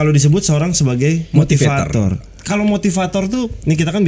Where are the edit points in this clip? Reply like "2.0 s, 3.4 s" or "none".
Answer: 2.4 s